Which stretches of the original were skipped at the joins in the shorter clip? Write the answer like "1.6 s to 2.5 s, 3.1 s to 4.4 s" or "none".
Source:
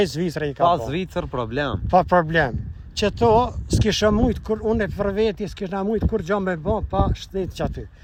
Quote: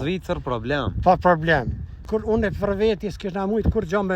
2.9 s to 4.4 s